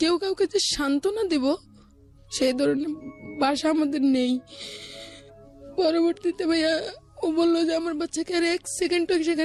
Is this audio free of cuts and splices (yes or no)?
yes